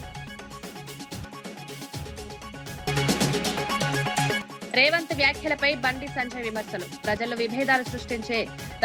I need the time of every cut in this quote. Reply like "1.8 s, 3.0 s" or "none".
none